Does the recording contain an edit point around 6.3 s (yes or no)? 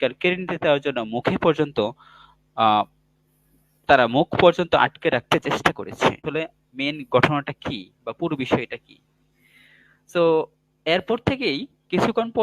yes